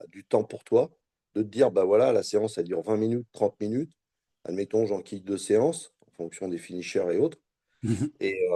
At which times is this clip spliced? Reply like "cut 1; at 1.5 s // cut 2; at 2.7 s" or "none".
none